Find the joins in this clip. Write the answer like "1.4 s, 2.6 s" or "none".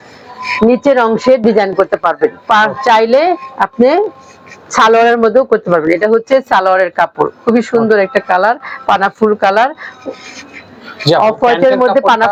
none

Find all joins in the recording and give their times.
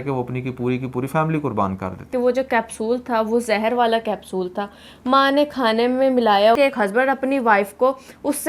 2.1 s, 6.6 s

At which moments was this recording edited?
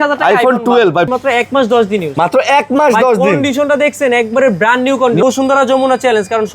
1.1 s, 5.2 s

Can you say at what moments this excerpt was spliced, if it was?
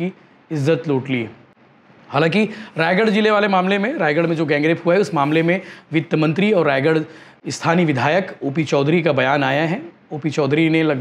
none

